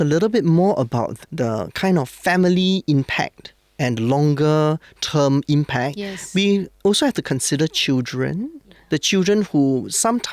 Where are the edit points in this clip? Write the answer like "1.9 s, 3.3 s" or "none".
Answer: 1.2 s